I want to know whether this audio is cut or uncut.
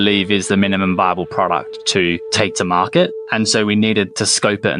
cut